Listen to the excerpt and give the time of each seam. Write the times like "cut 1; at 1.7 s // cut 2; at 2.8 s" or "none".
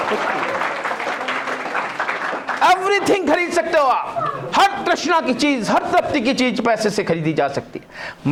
none